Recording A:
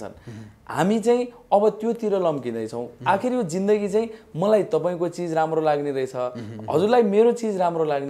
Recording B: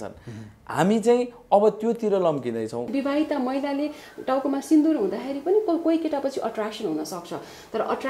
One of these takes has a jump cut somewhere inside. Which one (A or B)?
B